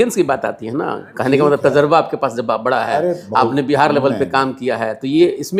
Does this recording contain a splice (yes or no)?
no